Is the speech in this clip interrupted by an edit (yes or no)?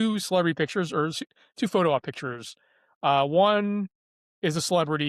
no